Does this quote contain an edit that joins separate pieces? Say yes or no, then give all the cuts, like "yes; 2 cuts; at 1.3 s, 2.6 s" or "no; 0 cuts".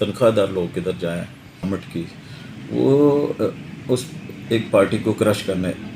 yes; 1 cut; at 1.6 s